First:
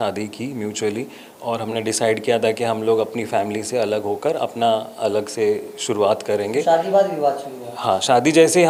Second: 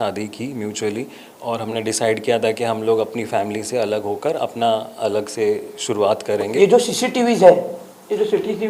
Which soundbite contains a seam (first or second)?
second